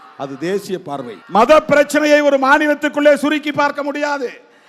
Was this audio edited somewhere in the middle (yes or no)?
yes